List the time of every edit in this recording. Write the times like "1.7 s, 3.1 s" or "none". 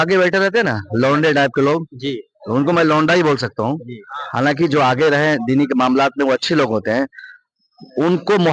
none